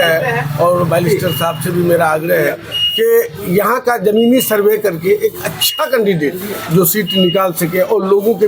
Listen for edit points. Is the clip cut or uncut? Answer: uncut